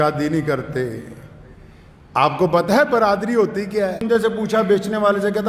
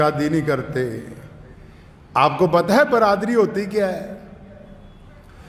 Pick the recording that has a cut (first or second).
first